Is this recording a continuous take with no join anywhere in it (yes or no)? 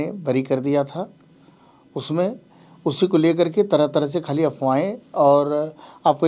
yes